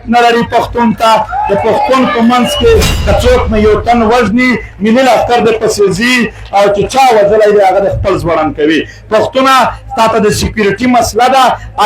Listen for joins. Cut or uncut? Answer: cut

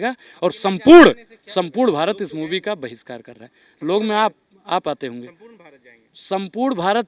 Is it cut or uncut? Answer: uncut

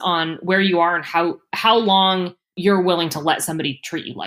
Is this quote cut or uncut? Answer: cut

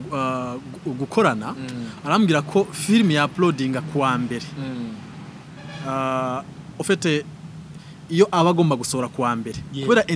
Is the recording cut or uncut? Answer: uncut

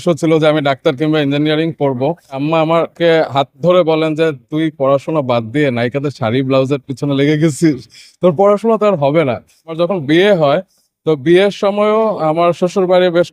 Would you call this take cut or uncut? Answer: cut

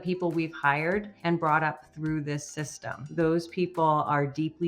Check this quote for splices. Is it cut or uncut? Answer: cut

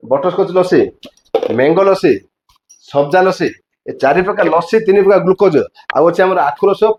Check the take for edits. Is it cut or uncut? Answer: uncut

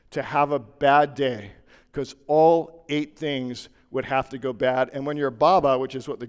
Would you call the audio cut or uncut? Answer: uncut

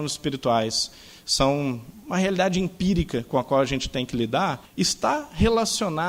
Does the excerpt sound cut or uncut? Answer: cut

